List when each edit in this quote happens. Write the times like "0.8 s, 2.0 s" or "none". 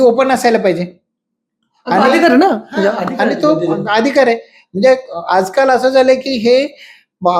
none